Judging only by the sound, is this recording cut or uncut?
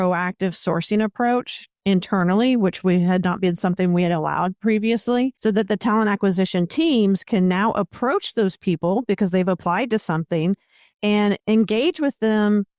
uncut